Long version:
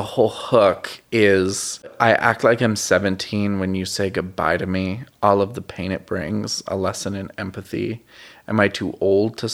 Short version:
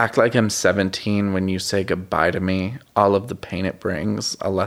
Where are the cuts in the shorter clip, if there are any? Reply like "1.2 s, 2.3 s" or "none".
none